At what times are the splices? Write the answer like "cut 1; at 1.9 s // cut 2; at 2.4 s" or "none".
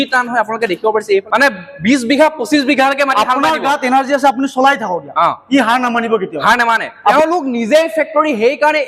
cut 1; at 1.2 s // cut 2; at 6.9 s